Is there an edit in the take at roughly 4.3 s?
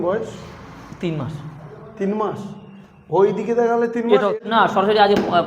yes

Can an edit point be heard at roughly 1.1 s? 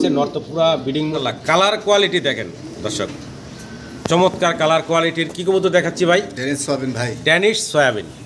yes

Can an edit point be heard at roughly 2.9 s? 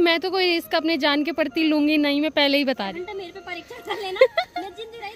yes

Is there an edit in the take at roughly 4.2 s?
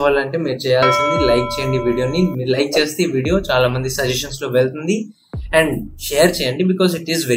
no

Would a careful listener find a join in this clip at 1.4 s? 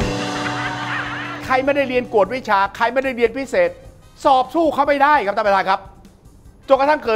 yes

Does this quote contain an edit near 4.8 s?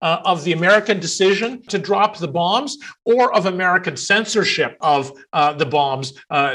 yes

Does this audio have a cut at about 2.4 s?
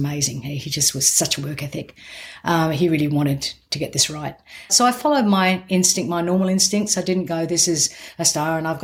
no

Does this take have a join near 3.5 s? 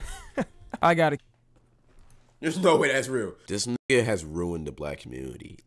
yes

